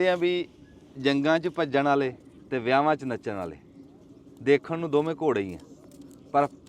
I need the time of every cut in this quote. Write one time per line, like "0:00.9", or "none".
0:02.3